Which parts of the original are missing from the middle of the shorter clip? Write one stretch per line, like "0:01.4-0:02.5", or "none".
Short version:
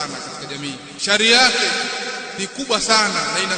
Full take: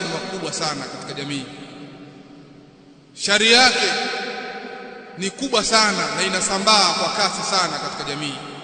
0:01.6-0:03.1
0:04.5-0:05.1